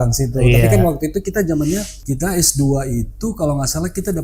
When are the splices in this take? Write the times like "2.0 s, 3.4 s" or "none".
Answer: 2.0 s